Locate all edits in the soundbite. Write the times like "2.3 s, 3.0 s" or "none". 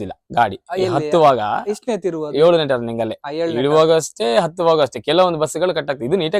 none